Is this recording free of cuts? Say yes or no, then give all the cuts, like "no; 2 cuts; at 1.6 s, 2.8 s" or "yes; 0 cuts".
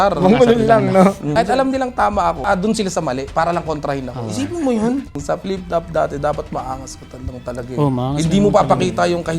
no; 3 cuts; at 1.3 s, 2.4 s, 5.1 s